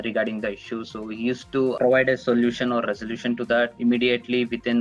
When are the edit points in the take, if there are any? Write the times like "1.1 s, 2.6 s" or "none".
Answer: 1.8 s, 3.7 s

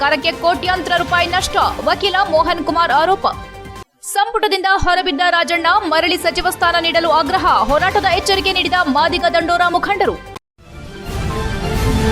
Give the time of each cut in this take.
10.3 s

